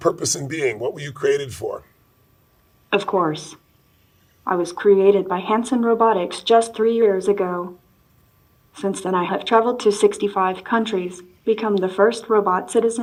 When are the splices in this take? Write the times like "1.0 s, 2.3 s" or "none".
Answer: none